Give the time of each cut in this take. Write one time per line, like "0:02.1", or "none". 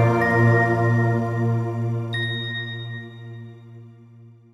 none